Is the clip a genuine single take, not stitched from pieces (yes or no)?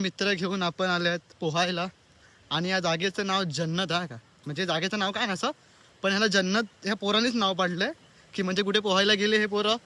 yes